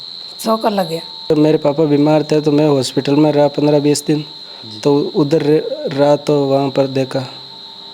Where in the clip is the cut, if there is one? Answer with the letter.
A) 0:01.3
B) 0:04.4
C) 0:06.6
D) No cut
A